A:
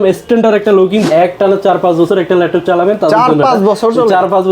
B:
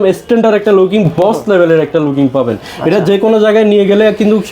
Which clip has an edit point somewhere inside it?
A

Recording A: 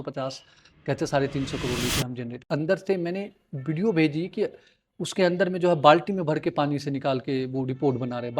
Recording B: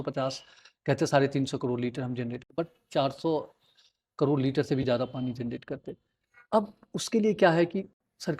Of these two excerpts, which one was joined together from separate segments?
A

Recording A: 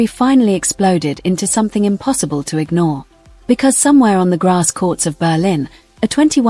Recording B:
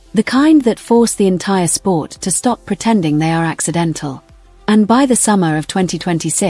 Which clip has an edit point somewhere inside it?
B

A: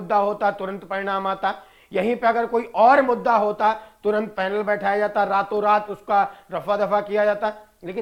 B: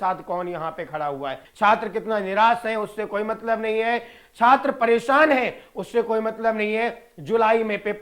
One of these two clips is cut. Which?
B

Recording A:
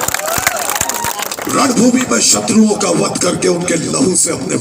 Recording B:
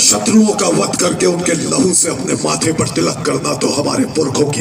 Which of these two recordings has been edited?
A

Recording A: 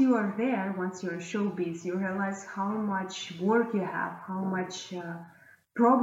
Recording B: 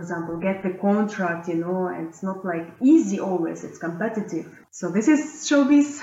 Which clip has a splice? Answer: B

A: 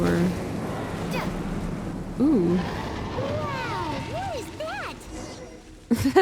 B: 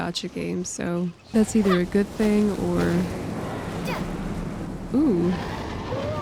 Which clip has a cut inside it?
B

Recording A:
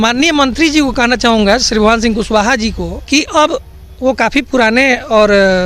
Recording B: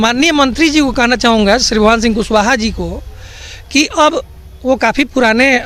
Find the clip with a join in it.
A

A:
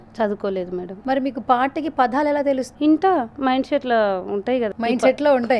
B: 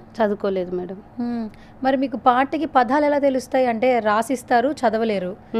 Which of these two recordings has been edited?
A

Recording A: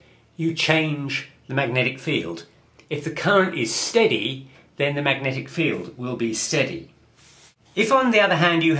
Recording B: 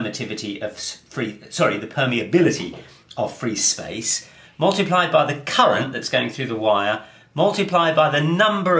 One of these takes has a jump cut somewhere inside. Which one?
A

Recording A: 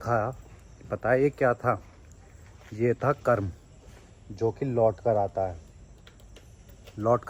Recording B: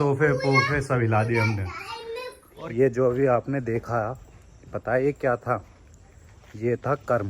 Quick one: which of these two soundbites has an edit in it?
B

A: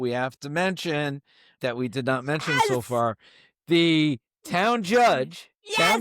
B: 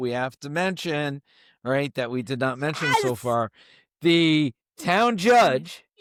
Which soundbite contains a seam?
A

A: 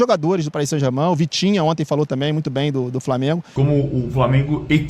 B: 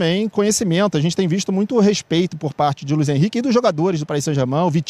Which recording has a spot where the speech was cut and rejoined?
A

